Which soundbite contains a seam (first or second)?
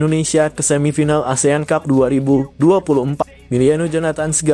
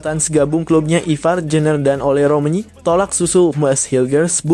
first